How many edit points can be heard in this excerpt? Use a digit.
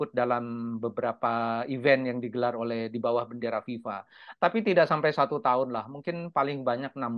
0